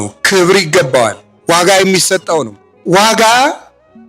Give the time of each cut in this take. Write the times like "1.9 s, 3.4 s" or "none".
1.3 s